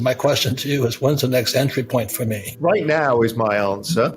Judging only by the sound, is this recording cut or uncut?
cut